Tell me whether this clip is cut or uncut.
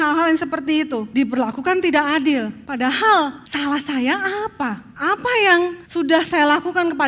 cut